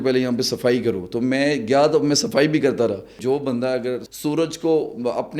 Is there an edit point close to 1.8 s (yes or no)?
no